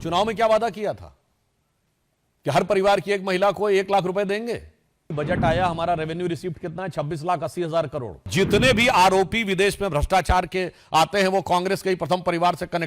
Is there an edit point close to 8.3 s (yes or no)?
yes